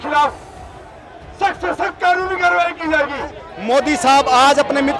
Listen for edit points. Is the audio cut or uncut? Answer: cut